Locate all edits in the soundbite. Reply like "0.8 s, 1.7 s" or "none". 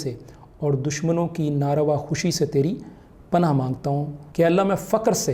4.2 s